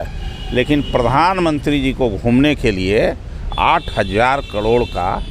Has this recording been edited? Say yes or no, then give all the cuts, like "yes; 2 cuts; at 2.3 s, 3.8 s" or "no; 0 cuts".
no; 0 cuts